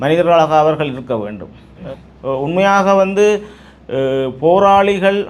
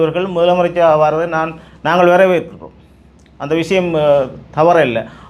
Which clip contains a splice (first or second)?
first